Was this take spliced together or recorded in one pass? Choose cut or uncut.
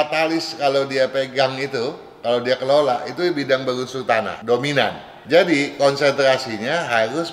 cut